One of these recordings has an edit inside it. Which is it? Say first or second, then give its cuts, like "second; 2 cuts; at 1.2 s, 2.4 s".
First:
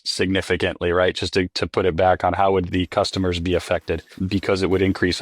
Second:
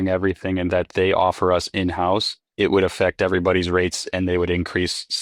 first; 1 cut; at 2.7 s